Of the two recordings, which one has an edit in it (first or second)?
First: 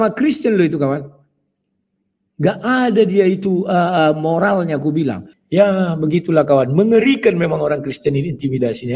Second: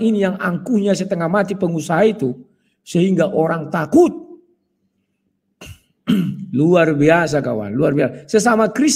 first